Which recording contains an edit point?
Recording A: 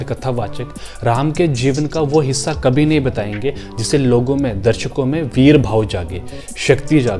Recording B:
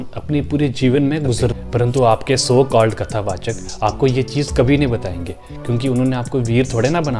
B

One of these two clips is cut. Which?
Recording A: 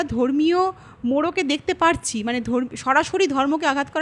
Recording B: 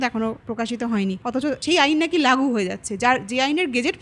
B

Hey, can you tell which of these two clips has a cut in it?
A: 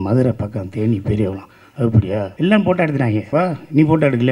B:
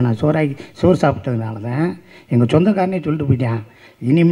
A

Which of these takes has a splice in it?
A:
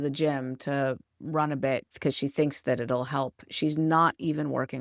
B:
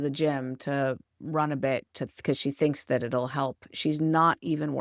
A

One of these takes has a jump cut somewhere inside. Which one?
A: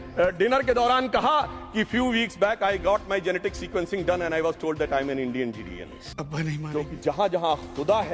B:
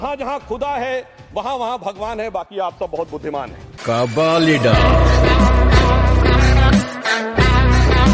A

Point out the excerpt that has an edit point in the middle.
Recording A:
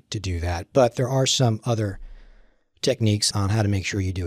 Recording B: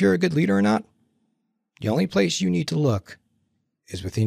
A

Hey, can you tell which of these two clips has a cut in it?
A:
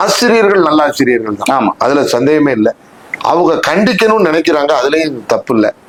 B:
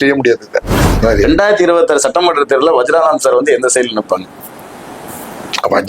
B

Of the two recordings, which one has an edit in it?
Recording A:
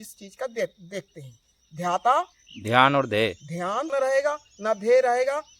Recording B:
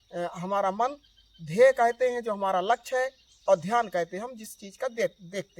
A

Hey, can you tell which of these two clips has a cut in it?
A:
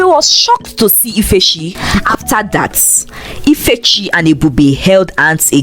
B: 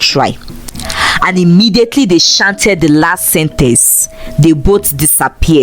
A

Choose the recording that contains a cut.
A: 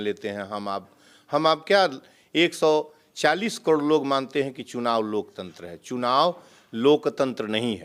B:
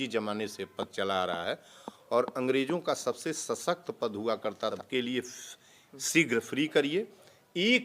B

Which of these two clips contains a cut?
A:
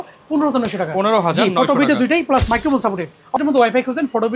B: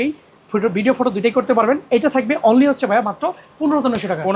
A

